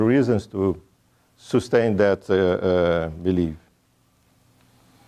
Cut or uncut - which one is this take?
uncut